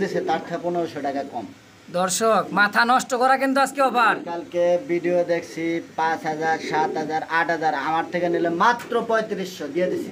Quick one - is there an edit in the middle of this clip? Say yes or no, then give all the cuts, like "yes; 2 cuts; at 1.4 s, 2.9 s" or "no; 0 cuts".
no; 0 cuts